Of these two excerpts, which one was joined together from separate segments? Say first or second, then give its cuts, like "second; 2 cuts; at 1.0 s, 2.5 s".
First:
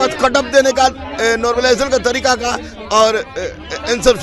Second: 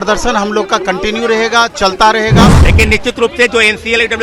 second; 1 cut; at 2.6 s